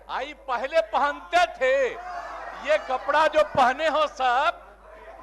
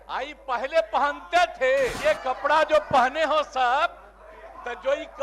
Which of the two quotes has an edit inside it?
second; 1 cut; at 2.0 s

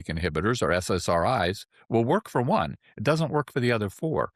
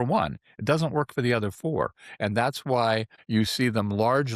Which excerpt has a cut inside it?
second; 1 cut; at 3.1 s

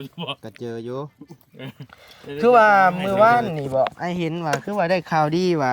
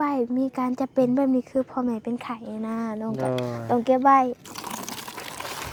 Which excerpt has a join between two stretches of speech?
first; 1 cut; at 2.4 s

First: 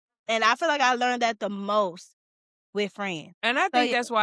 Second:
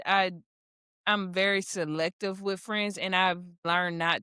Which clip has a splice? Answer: first; 1 cut; at 3.3 s

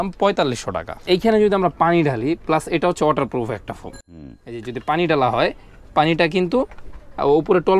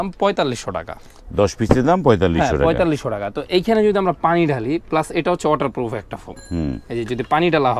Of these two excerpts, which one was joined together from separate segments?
first; 1 cut; at 0.9 s

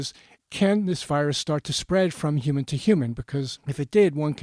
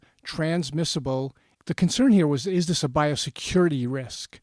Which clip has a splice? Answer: second; 1 cut; at 1.5 s

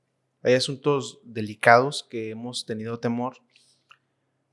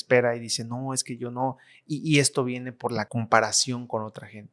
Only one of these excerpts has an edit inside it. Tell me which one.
second; 1 cut; at 3.1 s

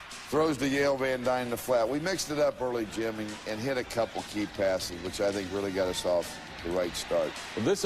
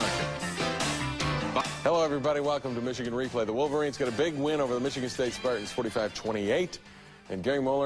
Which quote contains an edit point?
second; 1 cut; at 3.6 s

